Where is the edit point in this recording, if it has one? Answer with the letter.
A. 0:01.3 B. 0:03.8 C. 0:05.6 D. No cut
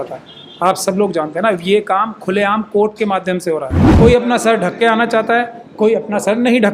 B